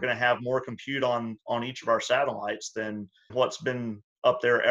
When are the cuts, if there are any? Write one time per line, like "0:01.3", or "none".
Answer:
0:03.3